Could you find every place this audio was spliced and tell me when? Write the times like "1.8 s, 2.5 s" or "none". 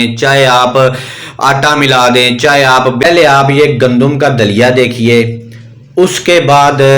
3.0 s